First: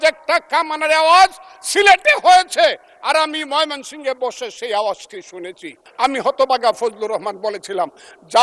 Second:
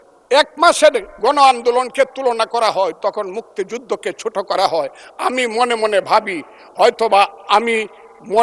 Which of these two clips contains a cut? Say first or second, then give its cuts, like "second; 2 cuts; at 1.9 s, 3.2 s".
first; 1 cut; at 5.8 s